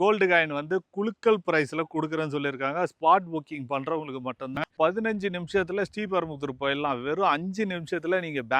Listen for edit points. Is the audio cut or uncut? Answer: cut